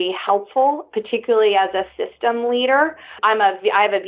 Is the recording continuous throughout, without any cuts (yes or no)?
no